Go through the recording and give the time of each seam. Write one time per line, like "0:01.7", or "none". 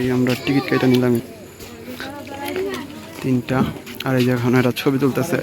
none